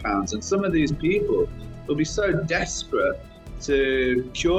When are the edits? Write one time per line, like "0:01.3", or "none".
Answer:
none